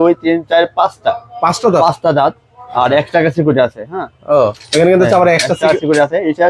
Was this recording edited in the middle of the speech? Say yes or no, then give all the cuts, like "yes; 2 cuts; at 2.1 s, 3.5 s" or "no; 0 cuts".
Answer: no; 0 cuts